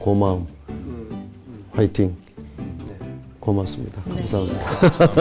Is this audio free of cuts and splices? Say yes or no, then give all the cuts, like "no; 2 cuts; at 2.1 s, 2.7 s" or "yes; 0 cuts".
yes; 0 cuts